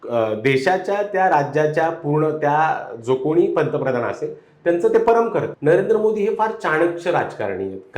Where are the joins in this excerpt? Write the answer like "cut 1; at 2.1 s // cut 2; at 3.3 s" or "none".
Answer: cut 1; at 5.5 s

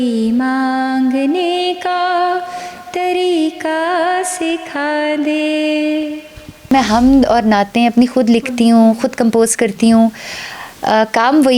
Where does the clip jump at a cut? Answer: cut 1; at 6.7 s

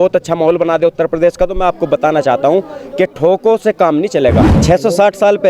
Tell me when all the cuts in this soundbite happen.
cut 1; at 4.5 s

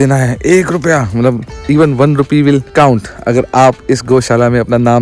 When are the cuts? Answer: none

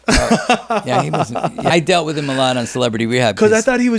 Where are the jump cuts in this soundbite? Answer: cut 1; at 1.7 s

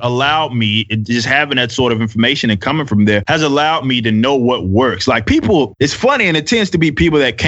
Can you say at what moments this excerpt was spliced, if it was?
cut 1; at 3.2 s // cut 2; at 5.7 s

